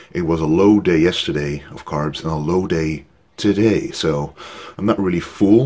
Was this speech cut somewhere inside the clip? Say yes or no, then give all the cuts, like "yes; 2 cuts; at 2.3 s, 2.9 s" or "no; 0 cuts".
no; 0 cuts